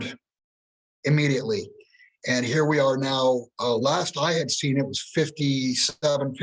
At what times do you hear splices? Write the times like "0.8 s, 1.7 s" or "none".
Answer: none